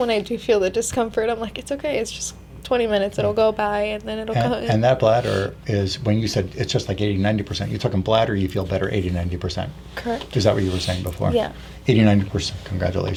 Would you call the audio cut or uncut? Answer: uncut